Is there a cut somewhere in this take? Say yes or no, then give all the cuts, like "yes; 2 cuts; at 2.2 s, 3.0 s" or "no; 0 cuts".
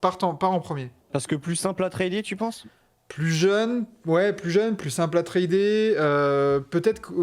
yes; 1 cut; at 0.9 s